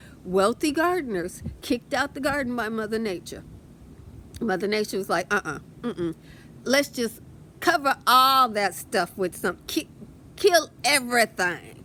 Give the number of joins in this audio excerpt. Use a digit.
0